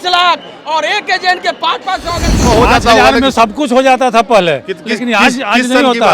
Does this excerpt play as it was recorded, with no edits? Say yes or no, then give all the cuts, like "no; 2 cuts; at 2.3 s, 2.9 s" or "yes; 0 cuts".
no; 1 cut; at 2.5 s